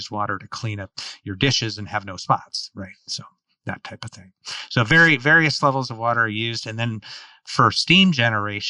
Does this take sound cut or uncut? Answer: uncut